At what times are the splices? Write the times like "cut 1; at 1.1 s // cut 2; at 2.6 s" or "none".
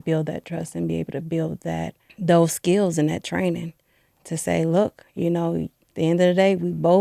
cut 1; at 2.0 s // cut 2; at 5.8 s